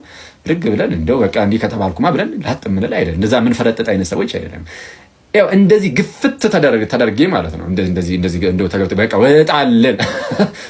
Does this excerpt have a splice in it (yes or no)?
no